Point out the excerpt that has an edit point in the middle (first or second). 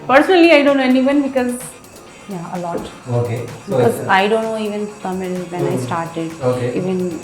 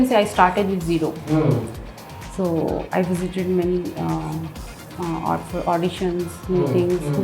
first